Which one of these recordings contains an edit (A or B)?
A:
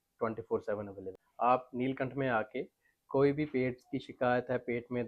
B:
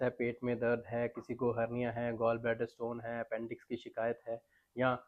A